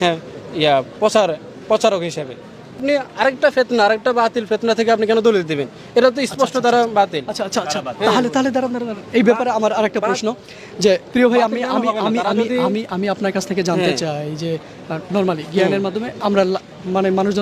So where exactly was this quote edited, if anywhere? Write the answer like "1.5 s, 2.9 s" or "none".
2.8 s